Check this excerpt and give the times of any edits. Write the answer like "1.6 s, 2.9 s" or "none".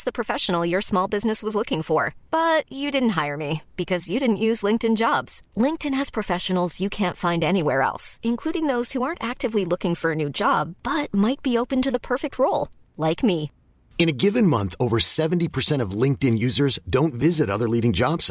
none

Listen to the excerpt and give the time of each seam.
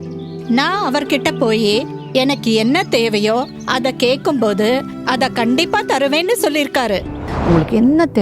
7.3 s

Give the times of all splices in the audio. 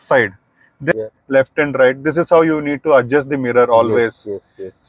0.9 s

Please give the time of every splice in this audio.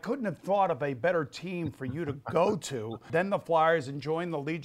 3.1 s

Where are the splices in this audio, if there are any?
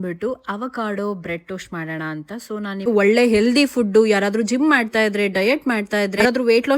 2.9 s

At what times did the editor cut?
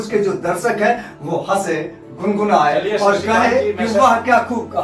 3.8 s

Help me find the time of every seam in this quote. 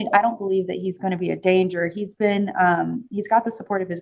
none

